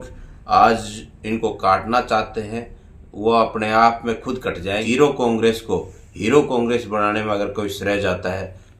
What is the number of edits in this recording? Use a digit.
1